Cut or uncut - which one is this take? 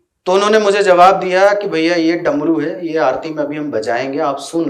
uncut